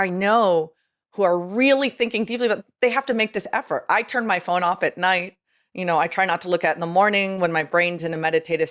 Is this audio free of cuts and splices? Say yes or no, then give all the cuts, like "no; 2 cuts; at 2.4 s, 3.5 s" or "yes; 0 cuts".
yes; 0 cuts